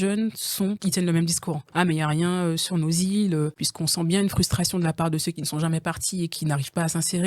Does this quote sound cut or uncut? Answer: cut